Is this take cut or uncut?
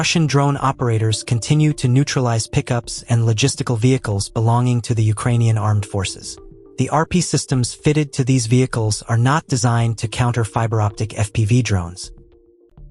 cut